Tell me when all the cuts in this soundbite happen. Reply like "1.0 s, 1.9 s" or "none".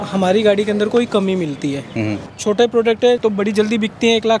2.2 s, 3.2 s